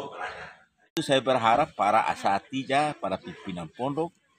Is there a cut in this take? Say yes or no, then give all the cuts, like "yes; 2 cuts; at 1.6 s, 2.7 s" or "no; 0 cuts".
yes; 1 cut; at 0.9 s